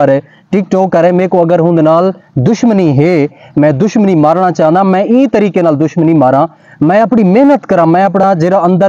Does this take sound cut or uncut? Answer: uncut